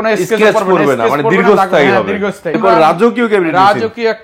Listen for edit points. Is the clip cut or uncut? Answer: cut